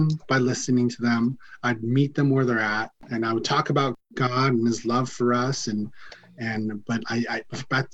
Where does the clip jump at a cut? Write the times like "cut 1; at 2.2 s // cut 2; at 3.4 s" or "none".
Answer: cut 1; at 3.0 s // cut 2; at 4.0 s

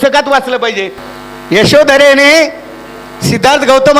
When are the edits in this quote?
cut 1; at 0.9 s

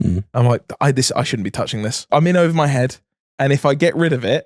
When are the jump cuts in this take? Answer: cut 1; at 2.0 s

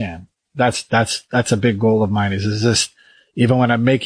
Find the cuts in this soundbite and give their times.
none

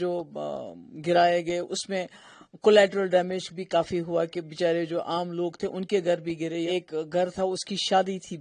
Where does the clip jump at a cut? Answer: cut 1; at 6.7 s

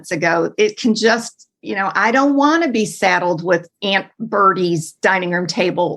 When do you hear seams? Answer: cut 1; at 3.7 s

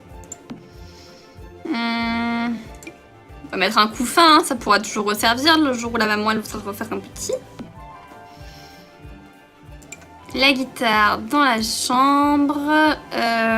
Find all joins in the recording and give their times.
cut 1; at 12.3 s

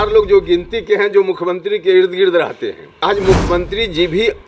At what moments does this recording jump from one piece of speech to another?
cut 1; at 3.0 s

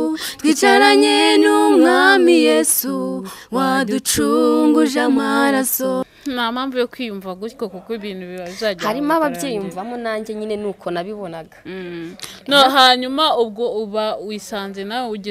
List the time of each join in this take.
cut 1; at 6.0 s

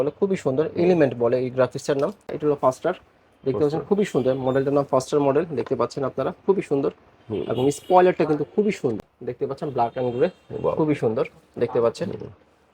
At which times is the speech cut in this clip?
cut 1; at 2.3 s // cut 2; at 9.0 s

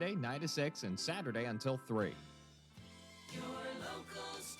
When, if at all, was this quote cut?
cut 1; at 2.3 s

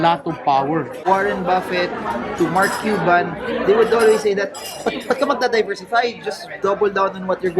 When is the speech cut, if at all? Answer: cut 1; at 0.9 s

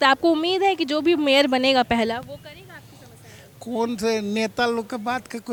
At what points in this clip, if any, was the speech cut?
none

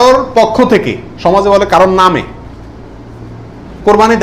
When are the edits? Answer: none

